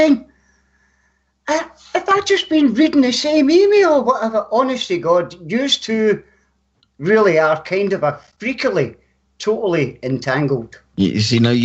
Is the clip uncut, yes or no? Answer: yes